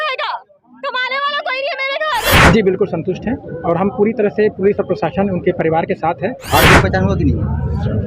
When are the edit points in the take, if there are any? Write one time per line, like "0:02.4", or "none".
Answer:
0:02.4
0:06.4